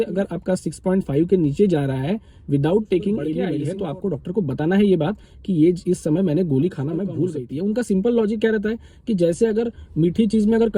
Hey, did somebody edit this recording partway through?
yes; 2 cuts; at 3.6 s, 7.4 s

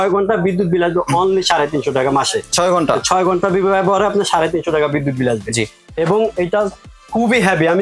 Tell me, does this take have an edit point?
no; 0 cuts

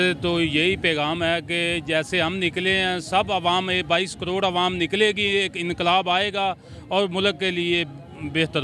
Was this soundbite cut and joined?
no; 0 cuts

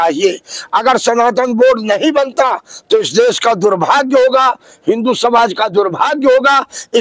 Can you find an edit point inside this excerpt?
no; 0 cuts

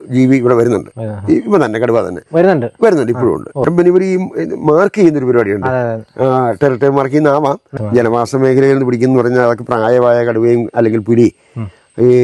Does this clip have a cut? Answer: yes; 2 cuts; at 3.6 s, 7.7 s

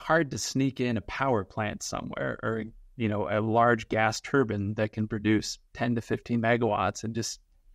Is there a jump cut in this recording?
no; 0 cuts

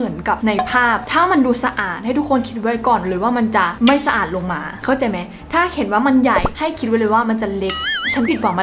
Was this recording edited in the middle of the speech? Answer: no; 0 cuts

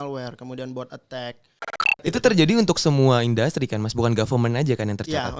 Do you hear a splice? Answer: yes; 1 cut; at 1.9 s

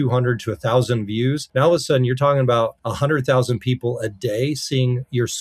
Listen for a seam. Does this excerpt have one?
yes; 2 cuts; at 1.4 s, 2.8 s

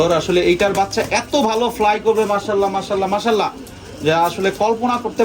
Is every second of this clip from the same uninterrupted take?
yes; 0 cuts

